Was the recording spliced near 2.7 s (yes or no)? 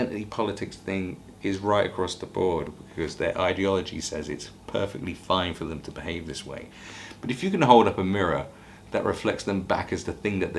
yes